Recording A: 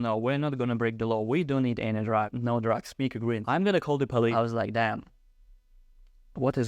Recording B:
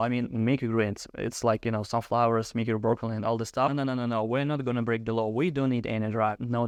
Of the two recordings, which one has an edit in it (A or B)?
A